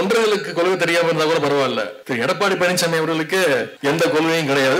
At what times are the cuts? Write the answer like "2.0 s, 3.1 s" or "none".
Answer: 2.0 s, 3.7 s